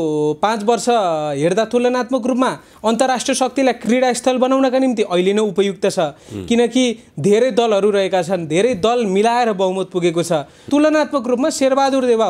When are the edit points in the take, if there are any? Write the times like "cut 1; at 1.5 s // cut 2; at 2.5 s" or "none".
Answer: cut 1; at 3.8 s // cut 2; at 10.6 s